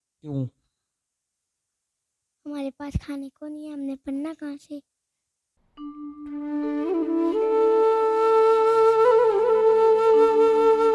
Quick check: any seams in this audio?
no; 0 cuts

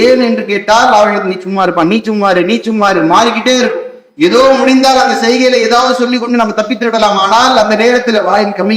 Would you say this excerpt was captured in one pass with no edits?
yes; 0 cuts

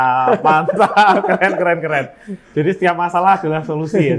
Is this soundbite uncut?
yes; 0 cuts

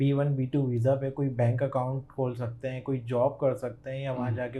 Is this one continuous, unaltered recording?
yes; 0 cuts

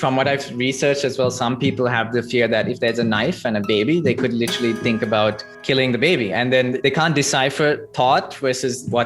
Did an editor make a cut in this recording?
yes; 2 cuts; at 5.5 s, 6.8 s

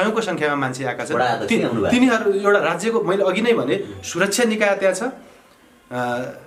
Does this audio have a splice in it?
no; 0 cuts

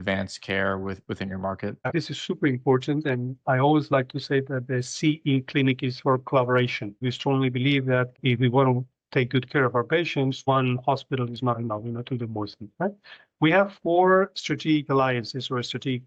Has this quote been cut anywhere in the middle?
yes; 2 cuts; at 1.8 s, 7.0 s

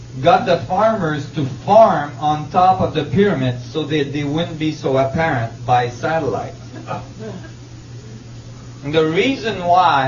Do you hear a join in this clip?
yes; 1 cut; at 1.0 s

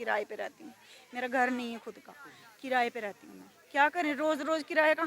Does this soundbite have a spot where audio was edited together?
no; 0 cuts

